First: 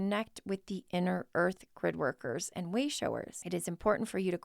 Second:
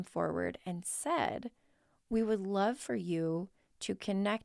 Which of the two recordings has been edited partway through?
first; 1 cut; at 3.4 s

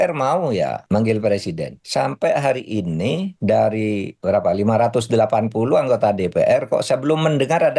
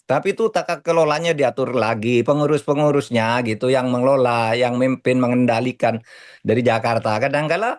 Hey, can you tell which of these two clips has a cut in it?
first; 4 cuts; at 0.8 s, 1.7 s, 3.3 s, 4.1 s

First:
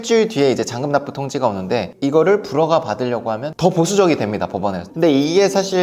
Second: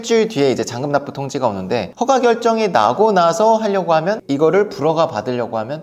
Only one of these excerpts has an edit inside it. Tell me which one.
first; 3 cuts; at 1.9 s, 3.5 s, 4.8 s

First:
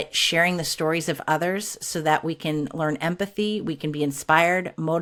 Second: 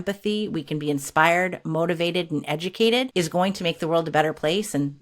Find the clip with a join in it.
second; 1 cut; at 3.1 s

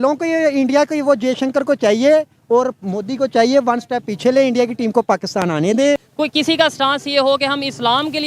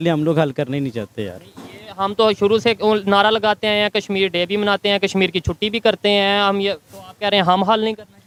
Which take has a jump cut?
first; 1 cut; at 6.1 s

